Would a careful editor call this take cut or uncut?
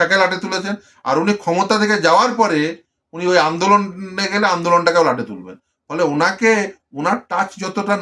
uncut